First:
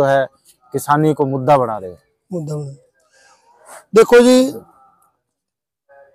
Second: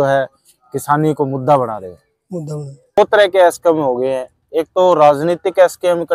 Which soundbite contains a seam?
second; 1 cut; at 3.0 s

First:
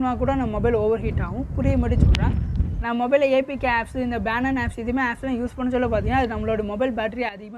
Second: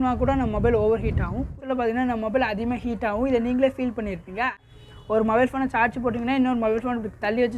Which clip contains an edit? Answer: second; 2 cuts; at 1.6 s, 4.6 s

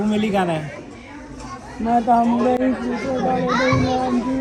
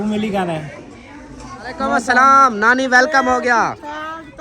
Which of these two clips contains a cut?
second; 1 cut; at 2.0 s

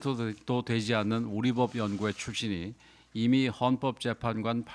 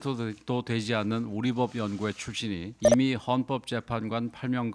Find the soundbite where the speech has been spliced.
second; 1 cut; at 2.7 s

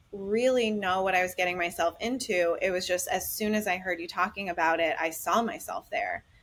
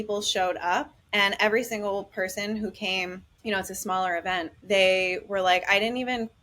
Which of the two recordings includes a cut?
second; 3 cuts; at 1.0 s, 3.3 s, 4.5 s

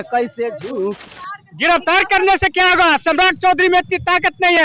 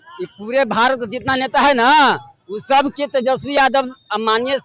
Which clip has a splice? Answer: first; 1 cut; at 1.1 s

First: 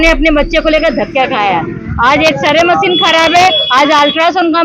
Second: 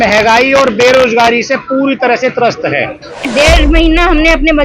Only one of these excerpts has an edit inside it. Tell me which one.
second; 1 cut; at 3.3 s

